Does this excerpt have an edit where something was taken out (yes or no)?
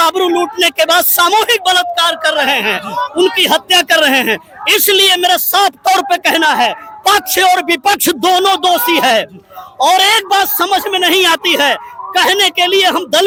no